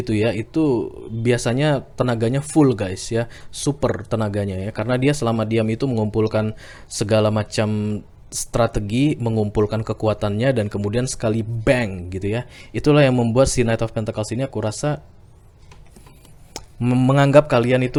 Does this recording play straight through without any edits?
yes; 0 cuts

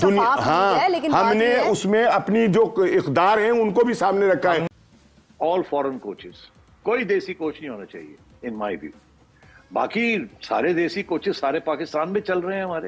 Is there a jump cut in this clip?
no; 0 cuts

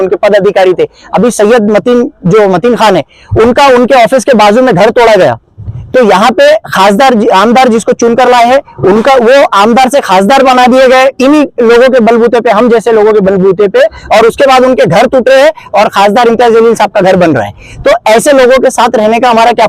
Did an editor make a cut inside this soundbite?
no; 0 cuts

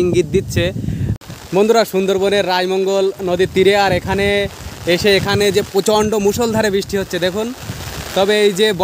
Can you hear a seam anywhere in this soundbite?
yes; 1 cut; at 1.1 s

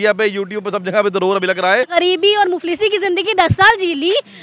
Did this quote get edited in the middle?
yes; 1 cut; at 1.9 s

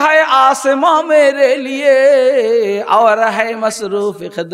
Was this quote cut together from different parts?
no; 0 cuts

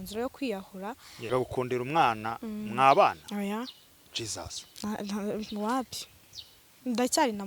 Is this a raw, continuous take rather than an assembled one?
no; 1 cut; at 1.3 s

